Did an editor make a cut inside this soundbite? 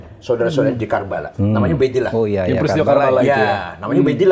no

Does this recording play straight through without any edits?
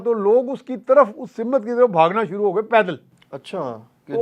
yes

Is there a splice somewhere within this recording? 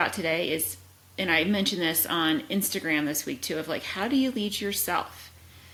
no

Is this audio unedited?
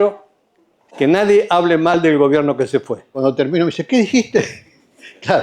no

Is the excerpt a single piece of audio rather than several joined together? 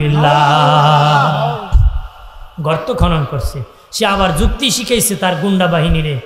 yes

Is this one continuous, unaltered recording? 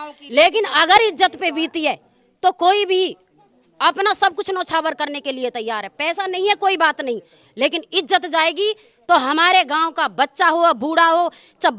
yes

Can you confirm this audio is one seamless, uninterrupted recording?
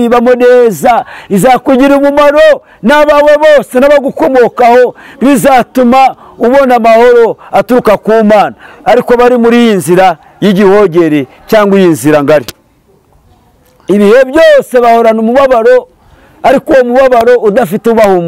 yes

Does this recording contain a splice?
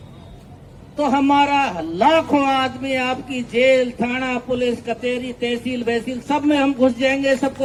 no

